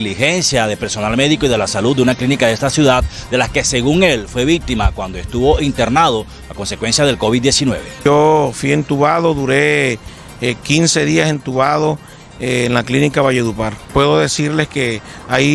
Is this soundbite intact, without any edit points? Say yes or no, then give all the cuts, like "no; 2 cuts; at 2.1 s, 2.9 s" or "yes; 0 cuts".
no; 2 cuts; at 8.0 s, 13.8 s